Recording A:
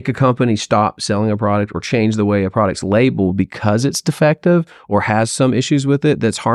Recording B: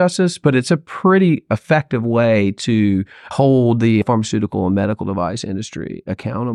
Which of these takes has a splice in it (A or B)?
B